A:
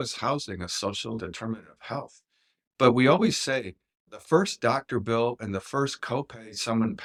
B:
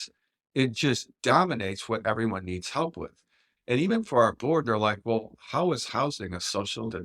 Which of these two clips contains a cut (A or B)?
B